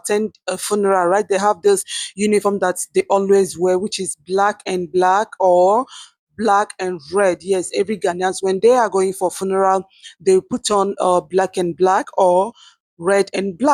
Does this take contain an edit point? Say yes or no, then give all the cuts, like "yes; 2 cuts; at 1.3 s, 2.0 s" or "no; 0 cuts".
no; 0 cuts